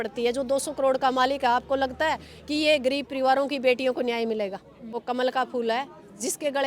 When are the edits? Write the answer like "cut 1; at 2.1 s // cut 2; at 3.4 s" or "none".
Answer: cut 1; at 5.0 s